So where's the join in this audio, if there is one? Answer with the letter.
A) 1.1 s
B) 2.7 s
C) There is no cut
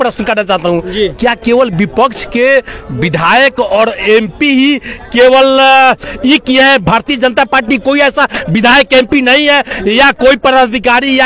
C